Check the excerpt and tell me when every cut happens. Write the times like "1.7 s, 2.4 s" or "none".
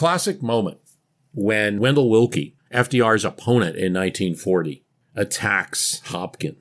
1.8 s, 2.6 s, 4.9 s